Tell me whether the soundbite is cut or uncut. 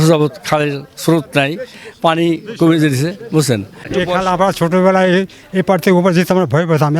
cut